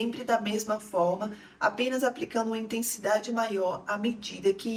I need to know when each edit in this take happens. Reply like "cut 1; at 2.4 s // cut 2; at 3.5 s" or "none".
none